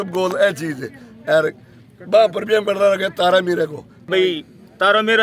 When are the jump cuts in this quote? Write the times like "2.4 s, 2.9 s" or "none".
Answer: 4.1 s